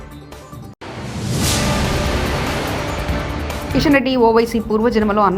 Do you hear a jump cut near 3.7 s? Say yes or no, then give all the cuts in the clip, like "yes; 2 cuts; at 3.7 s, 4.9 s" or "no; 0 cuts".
yes; 1 cut; at 3.7 s